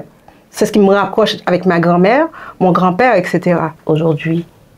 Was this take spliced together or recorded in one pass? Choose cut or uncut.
cut